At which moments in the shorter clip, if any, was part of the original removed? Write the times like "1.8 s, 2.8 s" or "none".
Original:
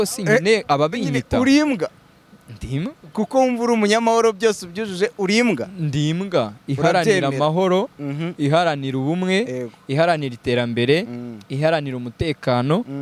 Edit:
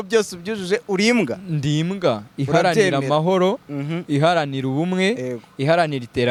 none